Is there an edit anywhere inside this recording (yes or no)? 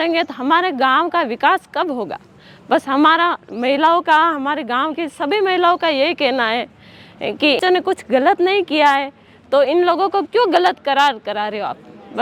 no